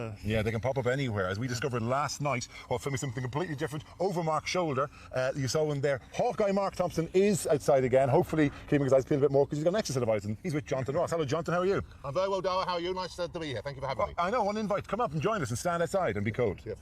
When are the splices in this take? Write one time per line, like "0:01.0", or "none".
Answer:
0:09.4